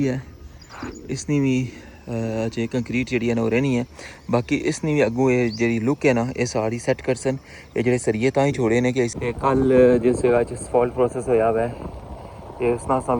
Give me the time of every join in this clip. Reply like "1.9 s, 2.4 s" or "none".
9.1 s

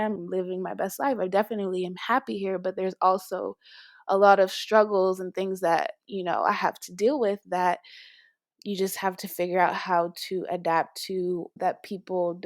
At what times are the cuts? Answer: 11.5 s

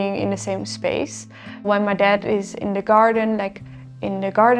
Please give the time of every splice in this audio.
1.7 s

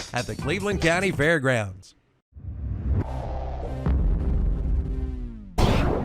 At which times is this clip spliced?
3.5 s

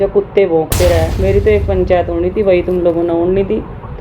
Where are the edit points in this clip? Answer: 1.1 s

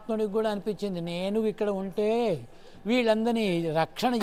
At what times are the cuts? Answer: none

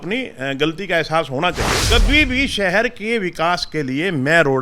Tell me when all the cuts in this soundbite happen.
1.7 s

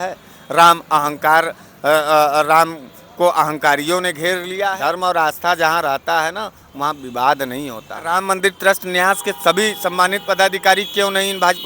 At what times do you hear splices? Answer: 4.8 s, 8.2 s

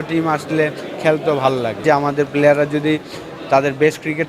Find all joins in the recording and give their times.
1.8 s

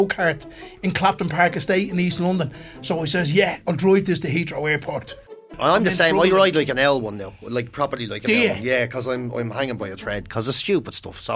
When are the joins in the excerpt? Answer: 3.6 s, 5.2 s

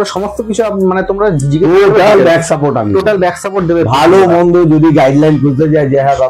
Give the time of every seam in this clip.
none

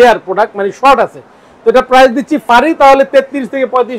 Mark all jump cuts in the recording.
2.4 s

